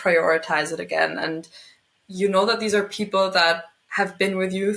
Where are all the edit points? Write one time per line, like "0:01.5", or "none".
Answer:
0:01.3